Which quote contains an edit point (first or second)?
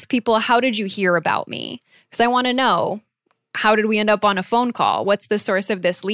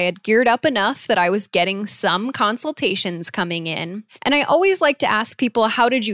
second